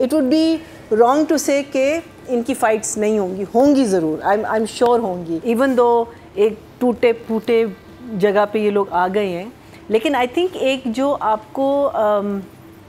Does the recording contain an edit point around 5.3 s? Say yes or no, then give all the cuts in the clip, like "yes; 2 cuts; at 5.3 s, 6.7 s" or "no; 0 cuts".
yes; 1 cut; at 5.3 s